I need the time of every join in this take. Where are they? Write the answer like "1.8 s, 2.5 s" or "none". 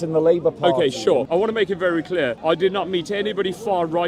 1.3 s, 2.4 s